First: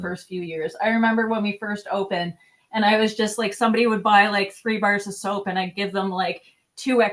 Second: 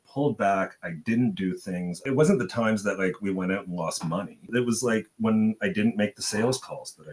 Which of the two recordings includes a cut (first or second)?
second